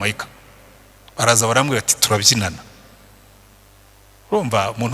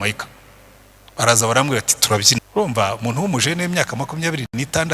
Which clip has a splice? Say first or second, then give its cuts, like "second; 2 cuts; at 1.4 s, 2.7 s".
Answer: second; 1 cut; at 2.4 s